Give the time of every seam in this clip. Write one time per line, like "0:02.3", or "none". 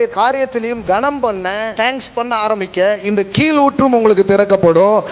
0:01.7